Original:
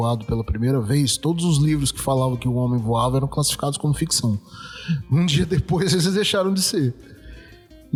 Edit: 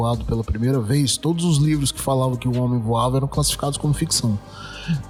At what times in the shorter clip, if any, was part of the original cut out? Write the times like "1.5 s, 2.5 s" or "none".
none